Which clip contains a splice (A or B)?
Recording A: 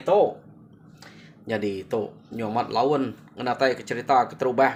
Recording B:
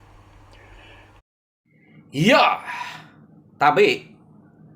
B